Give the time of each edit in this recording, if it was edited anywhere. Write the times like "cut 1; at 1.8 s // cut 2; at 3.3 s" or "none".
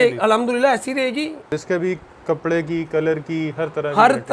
cut 1; at 1.6 s